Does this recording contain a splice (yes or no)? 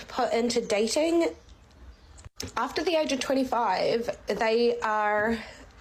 no